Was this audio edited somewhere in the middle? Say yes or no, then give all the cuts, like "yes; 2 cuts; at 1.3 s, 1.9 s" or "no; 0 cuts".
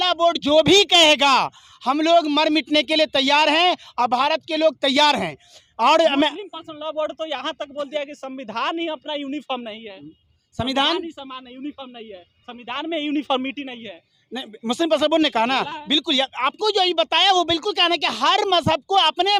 no; 0 cuts